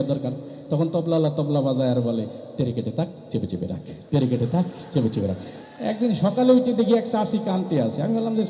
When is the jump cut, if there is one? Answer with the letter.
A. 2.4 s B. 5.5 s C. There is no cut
B